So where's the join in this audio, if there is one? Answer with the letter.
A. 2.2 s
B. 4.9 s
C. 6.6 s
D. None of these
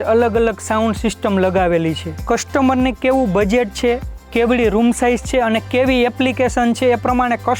A